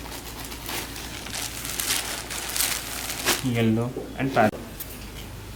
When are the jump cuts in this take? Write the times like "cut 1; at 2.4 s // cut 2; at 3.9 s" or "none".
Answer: cut 1; at 4.5 s